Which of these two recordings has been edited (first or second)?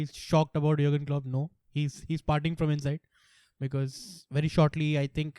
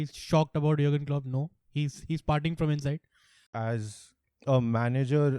second